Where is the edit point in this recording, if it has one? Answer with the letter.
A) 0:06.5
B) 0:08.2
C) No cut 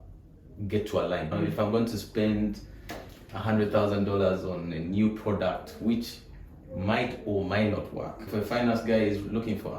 B